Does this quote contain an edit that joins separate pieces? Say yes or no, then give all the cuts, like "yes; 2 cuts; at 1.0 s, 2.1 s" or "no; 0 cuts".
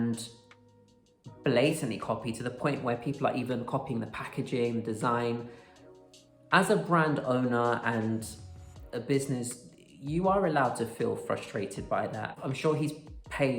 yes; 1 cut; at 12.3 s